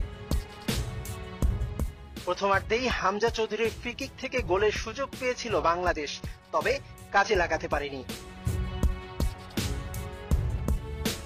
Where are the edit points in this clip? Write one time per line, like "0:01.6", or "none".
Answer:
0:10.2